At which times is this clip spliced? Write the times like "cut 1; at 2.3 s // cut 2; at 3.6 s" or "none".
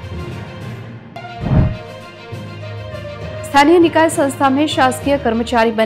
cut 1; at 1.0 s